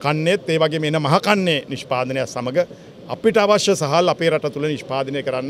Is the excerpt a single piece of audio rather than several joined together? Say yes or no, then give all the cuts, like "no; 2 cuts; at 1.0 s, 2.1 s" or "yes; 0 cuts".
yes; 0 cuts